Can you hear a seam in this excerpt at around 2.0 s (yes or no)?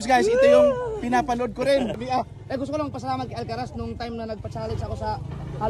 yes